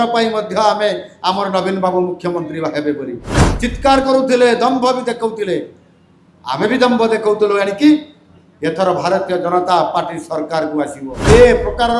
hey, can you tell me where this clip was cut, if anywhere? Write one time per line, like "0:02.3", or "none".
0:11.1